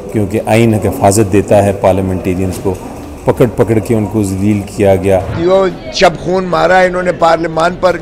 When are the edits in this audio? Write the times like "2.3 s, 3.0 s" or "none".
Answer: 5.3 s